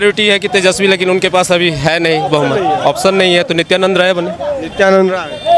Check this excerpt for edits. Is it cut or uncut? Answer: uncut